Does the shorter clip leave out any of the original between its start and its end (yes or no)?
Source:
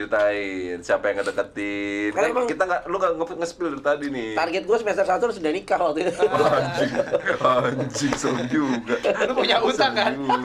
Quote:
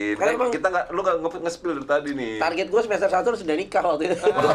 no